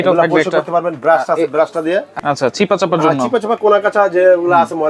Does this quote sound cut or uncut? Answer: cut